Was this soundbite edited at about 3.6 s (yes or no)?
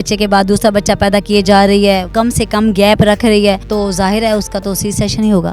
yes